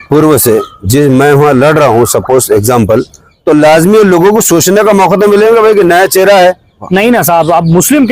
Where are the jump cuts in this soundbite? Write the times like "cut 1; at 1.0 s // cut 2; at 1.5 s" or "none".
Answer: cut 1; at 6.8 s